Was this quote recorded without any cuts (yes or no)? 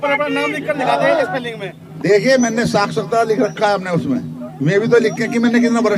yes